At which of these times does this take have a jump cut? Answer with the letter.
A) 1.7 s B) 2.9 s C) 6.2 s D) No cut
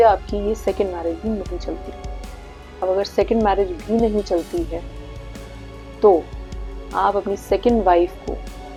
D